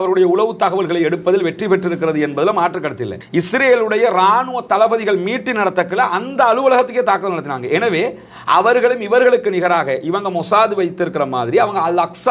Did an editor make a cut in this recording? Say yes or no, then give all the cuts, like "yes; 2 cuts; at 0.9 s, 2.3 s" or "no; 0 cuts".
yes; 1 cut; at 3.1 s